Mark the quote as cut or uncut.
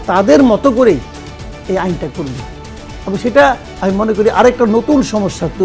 uncut